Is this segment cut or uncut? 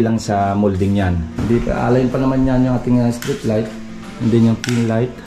cut